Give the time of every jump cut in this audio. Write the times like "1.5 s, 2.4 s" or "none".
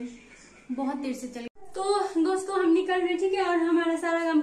1.5 s

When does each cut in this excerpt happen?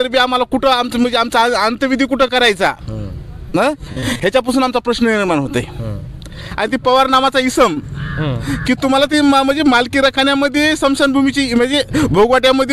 6.4 s

